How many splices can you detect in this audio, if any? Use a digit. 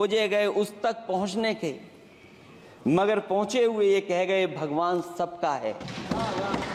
0